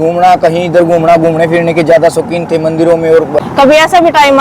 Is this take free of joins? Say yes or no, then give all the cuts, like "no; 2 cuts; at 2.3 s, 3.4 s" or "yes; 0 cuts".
no; 1 cut; at 3.4 s